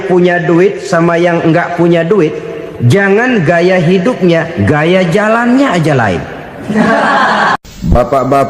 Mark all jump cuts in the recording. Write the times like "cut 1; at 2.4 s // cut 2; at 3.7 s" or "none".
cut 1; at 7.6 s